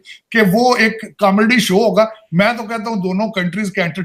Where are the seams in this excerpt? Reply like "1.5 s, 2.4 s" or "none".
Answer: none